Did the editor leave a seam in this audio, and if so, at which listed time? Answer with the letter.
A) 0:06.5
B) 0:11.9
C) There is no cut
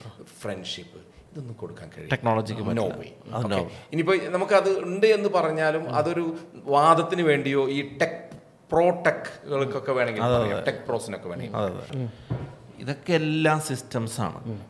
B